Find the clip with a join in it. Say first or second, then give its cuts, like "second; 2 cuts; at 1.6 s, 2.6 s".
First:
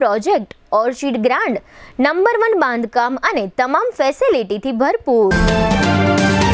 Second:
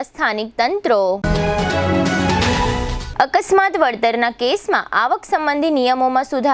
first; 1 cut; at 5.3 s